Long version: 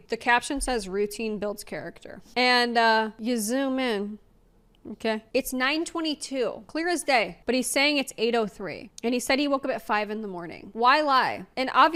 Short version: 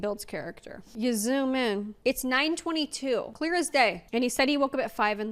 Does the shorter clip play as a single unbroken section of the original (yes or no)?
no